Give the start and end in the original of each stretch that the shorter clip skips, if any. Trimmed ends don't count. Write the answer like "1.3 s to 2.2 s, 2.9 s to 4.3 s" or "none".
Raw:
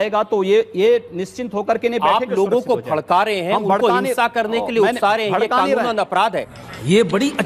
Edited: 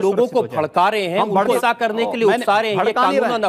3.9 s to 4.1 s

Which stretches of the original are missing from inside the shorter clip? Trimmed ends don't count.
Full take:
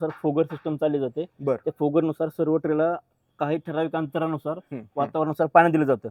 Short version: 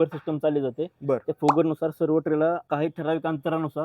3.0 s to 3.3 s

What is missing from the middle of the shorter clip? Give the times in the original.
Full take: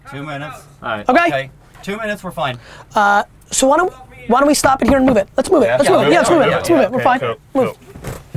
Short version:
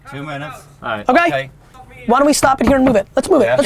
1.9 s to 4.1 s

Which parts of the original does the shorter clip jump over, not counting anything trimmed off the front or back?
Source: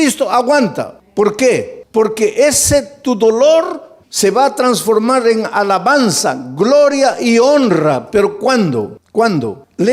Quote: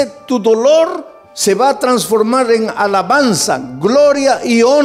none

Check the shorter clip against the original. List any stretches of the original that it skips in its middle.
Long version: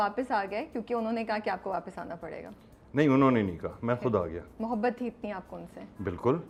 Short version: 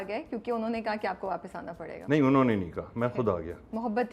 2.3 s to 2.8 s

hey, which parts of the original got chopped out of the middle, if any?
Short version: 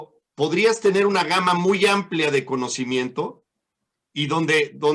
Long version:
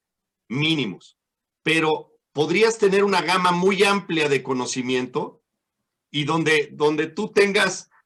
none

